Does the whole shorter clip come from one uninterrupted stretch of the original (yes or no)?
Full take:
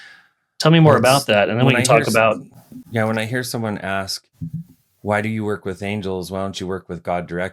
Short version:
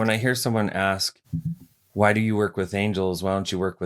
yes